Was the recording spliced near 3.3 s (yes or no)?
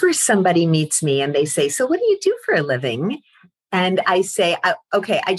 no